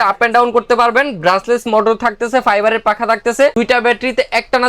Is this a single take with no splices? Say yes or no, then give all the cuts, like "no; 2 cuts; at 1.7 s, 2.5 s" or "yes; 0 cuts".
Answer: yes; 0 cuts